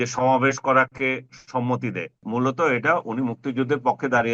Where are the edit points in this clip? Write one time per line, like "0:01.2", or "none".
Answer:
0:02.2